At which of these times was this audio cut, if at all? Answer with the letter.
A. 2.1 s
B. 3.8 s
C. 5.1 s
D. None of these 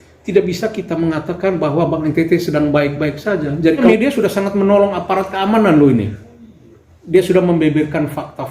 B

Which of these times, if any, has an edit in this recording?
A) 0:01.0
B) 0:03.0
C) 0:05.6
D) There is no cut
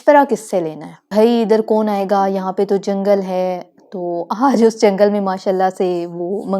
A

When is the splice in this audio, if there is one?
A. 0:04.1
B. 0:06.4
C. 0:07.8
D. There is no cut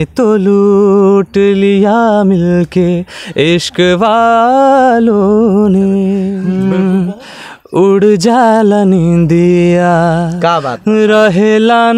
B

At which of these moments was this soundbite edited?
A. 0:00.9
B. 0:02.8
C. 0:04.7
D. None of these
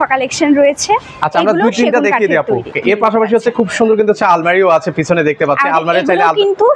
B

